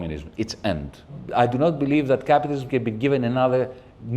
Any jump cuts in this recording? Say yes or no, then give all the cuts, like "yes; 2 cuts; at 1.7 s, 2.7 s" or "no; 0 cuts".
yes; 1 cut; at 1.2 s